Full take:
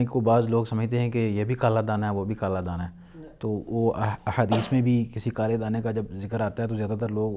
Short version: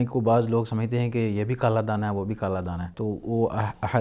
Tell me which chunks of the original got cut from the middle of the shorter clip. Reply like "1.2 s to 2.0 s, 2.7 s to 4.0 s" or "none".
2.9 s to 3.3 s